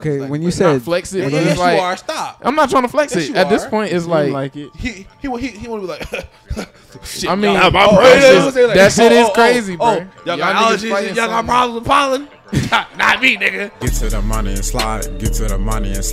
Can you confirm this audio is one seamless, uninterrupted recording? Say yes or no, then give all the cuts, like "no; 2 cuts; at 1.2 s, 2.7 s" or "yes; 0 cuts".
no; 1 cut; at 13.7 s